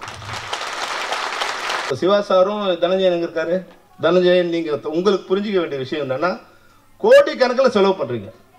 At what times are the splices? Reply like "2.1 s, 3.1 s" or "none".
1.9 s